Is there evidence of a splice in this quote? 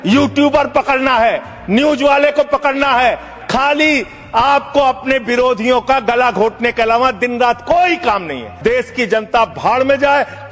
yes; 2 cuts; at 3.3 s, 8.5 s

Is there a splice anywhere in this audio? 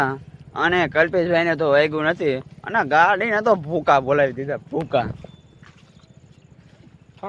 no; 0 cuts

